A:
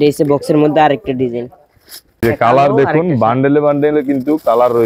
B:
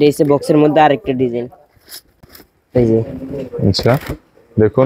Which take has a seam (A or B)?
A